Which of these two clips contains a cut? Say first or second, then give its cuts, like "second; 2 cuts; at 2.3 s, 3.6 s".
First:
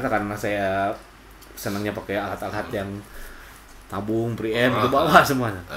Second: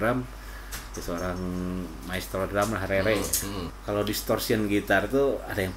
second; 1 cut; at 3.7 s